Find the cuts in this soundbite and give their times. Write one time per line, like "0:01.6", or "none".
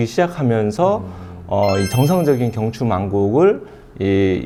none